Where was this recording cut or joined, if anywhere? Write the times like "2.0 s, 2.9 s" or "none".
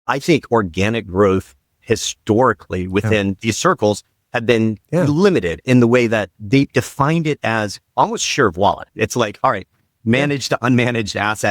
3.4 s, 9.8 s